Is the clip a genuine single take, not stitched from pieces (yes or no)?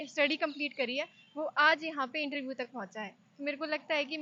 yes